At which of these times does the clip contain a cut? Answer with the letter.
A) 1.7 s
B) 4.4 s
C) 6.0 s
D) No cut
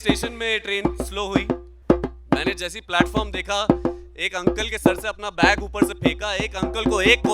A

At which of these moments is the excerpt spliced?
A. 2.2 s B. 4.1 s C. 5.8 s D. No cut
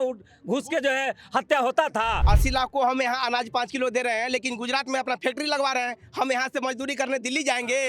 A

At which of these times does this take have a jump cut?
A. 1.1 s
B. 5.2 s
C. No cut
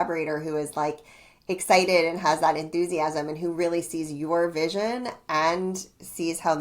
C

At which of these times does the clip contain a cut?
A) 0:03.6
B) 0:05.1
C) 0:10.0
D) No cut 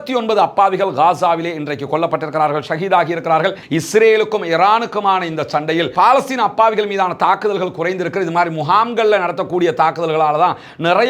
A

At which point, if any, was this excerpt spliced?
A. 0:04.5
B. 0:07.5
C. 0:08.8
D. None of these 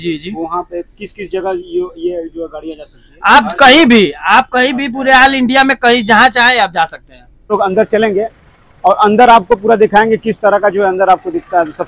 B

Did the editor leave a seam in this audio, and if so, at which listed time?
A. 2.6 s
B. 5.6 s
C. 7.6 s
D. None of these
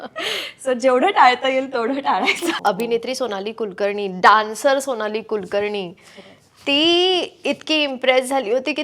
A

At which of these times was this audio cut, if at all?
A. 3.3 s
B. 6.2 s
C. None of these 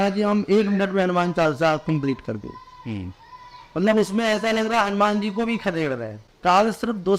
B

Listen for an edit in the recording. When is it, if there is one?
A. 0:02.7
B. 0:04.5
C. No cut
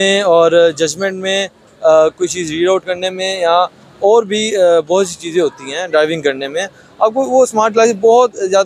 C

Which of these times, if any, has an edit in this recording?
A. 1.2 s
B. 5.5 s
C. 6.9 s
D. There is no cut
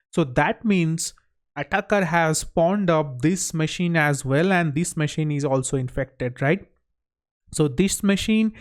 D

